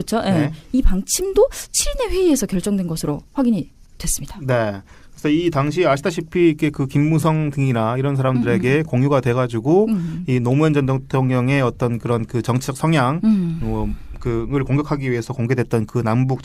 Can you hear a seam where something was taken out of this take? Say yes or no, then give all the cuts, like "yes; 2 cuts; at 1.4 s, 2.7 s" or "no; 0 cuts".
yes; 1 cut; at 8.4 s